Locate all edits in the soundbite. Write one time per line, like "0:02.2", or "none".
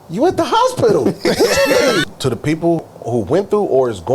0:02.0
0:02.8

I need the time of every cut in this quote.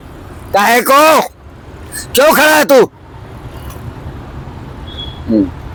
none

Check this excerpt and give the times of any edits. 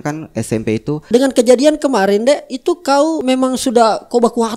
0:01.1
0:03.2

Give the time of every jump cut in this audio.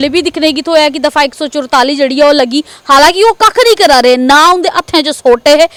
none

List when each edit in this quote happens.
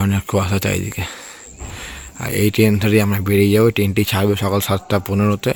none

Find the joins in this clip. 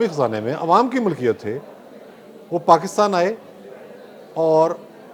none

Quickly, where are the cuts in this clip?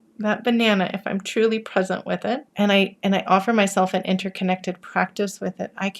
0:02.5

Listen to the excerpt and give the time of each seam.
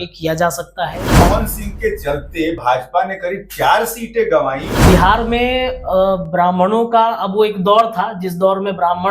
0:01.2
0:04.7

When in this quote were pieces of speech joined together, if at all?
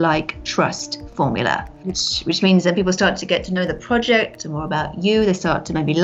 0:01.7

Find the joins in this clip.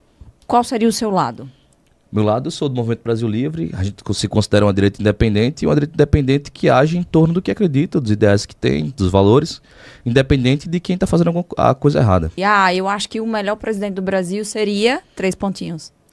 0:12.3

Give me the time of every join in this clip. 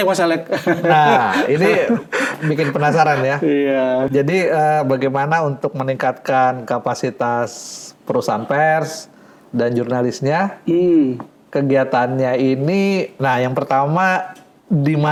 none

